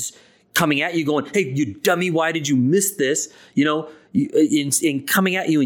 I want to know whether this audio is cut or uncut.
uncut